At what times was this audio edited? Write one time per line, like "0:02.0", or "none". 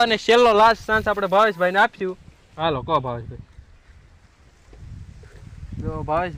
none